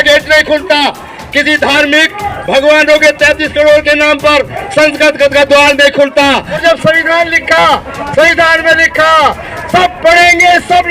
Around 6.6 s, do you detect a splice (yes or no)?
yes